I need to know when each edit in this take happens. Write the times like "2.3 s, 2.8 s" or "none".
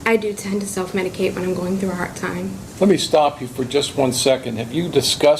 2.6 s